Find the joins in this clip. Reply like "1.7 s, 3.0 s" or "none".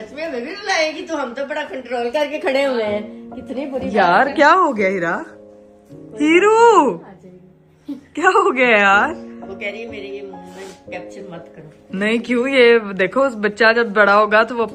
none